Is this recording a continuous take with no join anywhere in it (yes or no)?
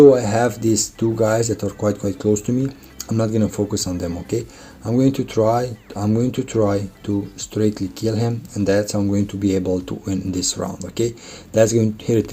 yes